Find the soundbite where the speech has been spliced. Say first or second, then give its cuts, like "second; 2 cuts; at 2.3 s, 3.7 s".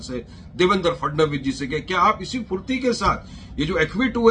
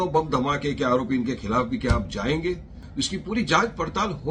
second; 1 cut; at 2.8 s